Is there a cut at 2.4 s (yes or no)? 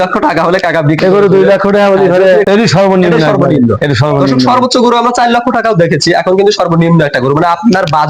yes